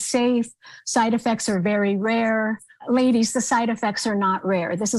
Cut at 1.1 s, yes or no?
no